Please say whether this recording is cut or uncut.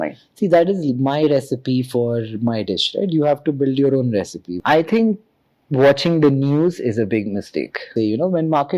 cut